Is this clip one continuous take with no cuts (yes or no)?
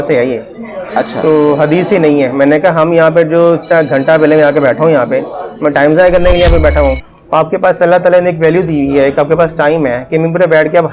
no